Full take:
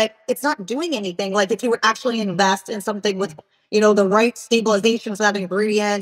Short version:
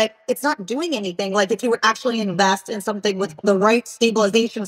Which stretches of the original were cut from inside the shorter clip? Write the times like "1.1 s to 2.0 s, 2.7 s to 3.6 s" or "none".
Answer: 3.5 s to 4.0 s